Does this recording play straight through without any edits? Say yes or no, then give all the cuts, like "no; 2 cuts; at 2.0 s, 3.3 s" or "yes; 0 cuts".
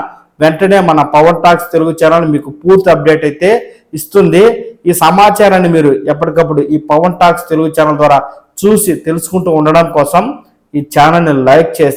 yes; 0 cuts